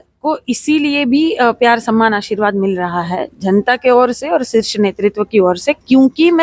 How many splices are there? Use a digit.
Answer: 0